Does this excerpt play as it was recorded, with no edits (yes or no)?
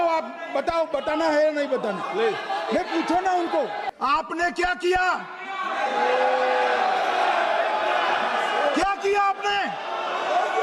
no